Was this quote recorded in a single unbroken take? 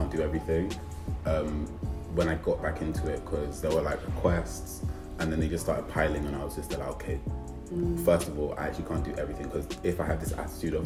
yes; 0 cuts

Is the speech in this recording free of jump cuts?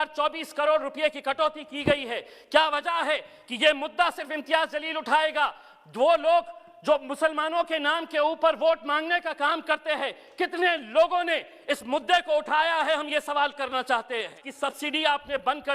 no; 1 cut; at 14.5 s

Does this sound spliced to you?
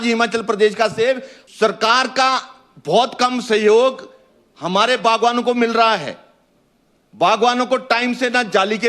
yes; 1 cut; at 1.3 s

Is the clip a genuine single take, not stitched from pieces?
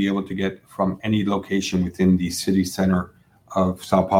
yes; 0 cuts

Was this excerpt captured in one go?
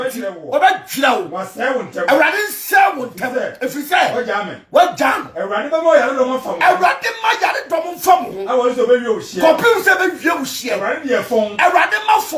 yes; 0 cuts

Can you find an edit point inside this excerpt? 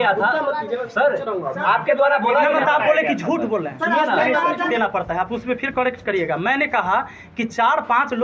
yes; 1 cut; at 4.7 s

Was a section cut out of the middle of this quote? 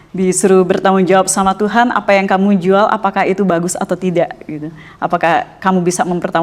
no; 0 cuts

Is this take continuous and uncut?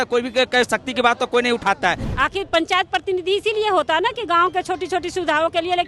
no; 1 cut; at 2.0 s

